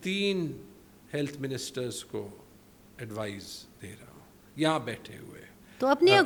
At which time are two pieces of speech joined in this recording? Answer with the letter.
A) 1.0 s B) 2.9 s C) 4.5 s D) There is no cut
D